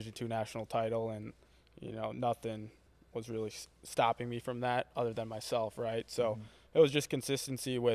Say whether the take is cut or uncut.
uncut